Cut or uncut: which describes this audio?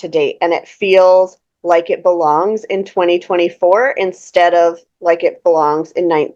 uncut